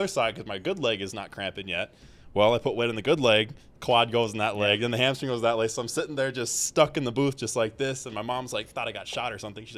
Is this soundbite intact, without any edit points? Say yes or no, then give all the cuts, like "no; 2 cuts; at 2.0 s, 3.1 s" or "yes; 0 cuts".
yes; 0 cuts